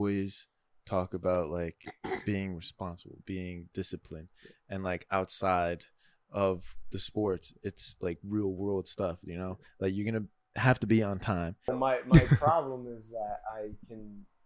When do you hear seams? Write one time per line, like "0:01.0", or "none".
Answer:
0:11.7